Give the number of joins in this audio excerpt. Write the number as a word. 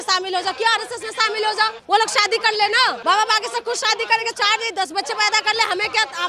two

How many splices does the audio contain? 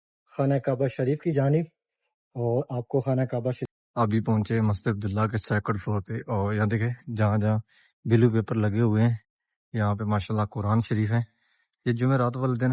one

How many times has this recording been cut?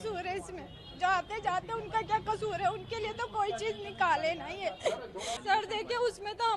one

